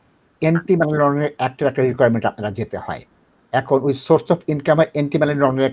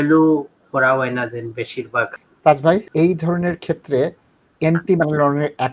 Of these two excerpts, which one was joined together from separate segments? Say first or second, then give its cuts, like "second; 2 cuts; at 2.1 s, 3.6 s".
second; 2 cuts; at 2.2 s, 2.9 s